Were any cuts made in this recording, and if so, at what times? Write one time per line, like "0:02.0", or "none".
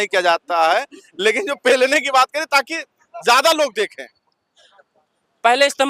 none